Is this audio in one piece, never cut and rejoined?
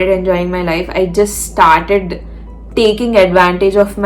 yes; 0 cuts

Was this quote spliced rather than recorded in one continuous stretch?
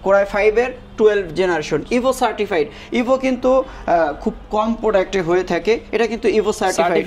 no; 0 cuts

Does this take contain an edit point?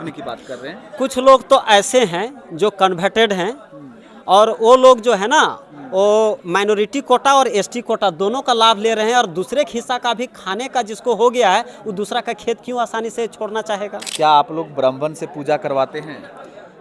yes; 1 cut; at 14.0 s

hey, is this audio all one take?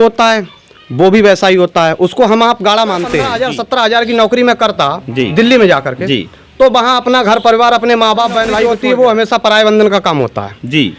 no; 2 cuts; at 3.4 s, 8.7 s

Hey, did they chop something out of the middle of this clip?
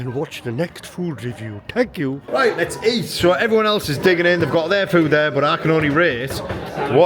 yes; 1 cut; at 2.2 s

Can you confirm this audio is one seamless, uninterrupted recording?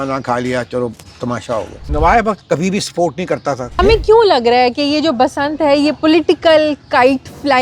no; 2 cuts; at 1.8 s, 3.8 s

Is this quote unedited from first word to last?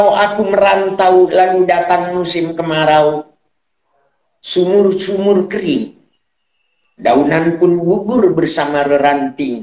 yes; 0 cuts

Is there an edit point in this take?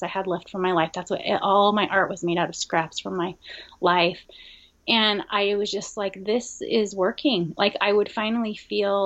no; 0 cuts

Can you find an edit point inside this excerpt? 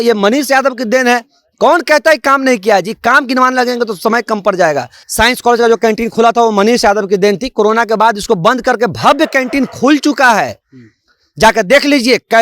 yes; 1 cut; at 5.0 s

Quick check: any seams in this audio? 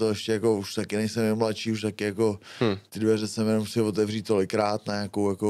no; 0 cuts

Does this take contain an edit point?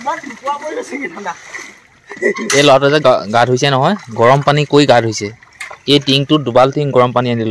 no; 0 cuts

